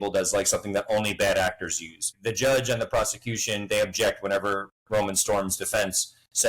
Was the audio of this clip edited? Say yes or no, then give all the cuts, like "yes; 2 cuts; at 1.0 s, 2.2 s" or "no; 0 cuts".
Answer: yes; 2 cuts; at 2.2 s, 4.7 s